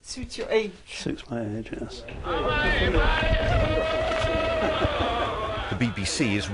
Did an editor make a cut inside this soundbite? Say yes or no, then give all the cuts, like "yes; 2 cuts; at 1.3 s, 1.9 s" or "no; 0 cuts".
yes; 1 cut; at 1.1 s